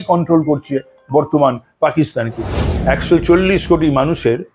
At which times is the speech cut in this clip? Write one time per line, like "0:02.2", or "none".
0:02.6